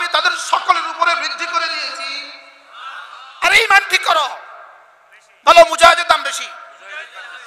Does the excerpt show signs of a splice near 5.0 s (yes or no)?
no